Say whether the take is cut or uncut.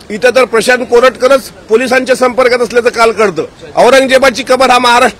cut